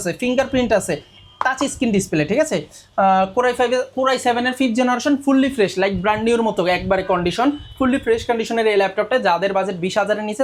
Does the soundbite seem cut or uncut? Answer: uncut